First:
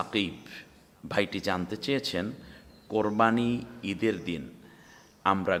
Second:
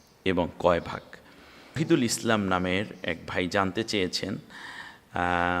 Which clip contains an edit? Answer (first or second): second